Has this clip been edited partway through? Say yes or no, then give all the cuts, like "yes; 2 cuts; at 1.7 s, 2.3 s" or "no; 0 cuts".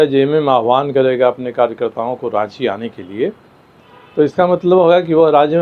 no; 0 cuts